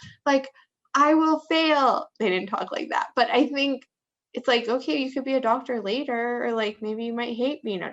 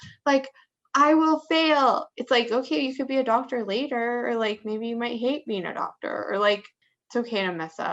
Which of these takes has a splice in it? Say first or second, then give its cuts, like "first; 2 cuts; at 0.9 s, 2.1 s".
second; 2 cuts; at 2.1 s, 6.7 s